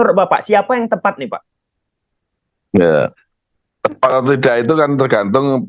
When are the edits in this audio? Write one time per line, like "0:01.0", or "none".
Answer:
none